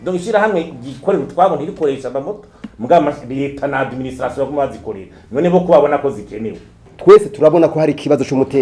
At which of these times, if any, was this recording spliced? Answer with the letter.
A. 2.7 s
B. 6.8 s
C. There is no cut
B